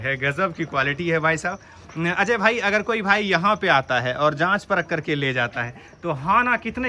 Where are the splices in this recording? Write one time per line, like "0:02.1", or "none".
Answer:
none